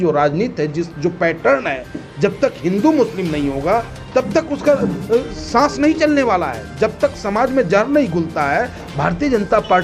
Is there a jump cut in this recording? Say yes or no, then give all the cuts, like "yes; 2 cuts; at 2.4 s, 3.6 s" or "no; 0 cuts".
no; 0 cuts